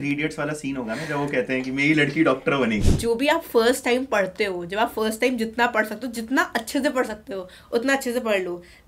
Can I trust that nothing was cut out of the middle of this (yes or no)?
no